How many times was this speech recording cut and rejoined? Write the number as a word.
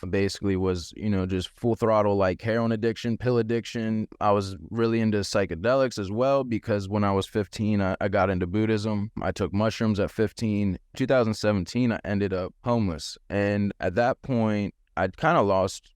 one